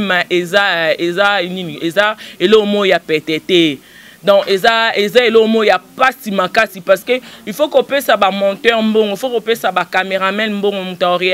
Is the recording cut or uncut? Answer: uncut